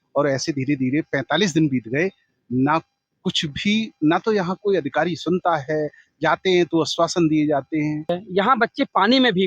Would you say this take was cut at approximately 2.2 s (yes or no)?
no